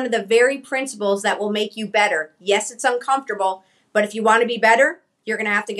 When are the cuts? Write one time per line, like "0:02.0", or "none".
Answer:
none

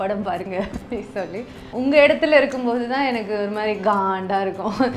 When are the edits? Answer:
0:01.6

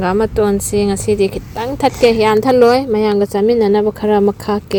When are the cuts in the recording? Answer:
none

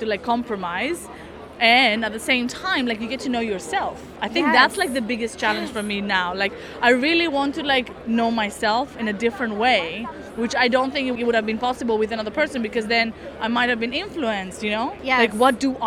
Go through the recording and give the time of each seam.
0:11.2
0:15.0

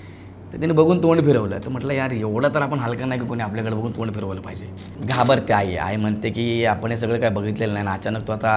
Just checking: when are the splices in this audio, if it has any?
0:05.0

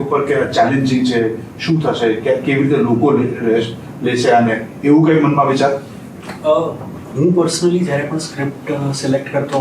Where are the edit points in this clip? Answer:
none

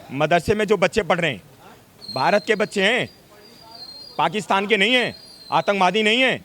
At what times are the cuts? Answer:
none

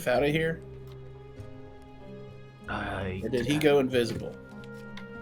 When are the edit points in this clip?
none

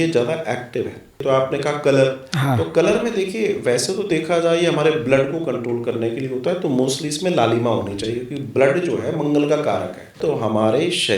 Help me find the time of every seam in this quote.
0:01.2
0:10.2

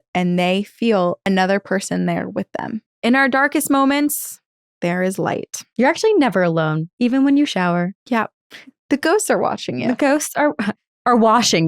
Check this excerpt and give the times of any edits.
0:01.2
0:02.8
0:05.6

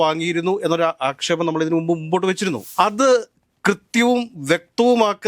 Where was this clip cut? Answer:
0:02.6

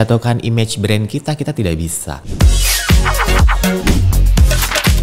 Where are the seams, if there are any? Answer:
0:02.2

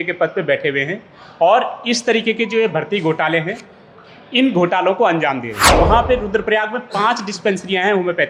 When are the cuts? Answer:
0:05.7

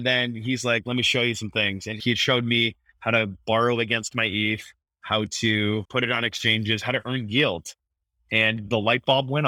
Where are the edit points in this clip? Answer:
0:02.0

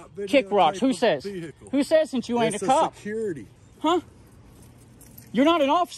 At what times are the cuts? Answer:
0:03.5

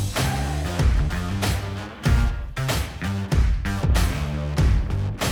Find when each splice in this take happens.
none

